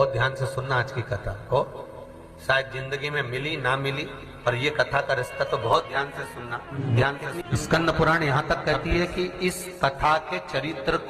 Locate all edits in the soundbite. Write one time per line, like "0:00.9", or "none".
0:06.7
0:07.4